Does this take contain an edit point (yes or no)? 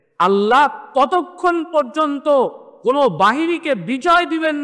yes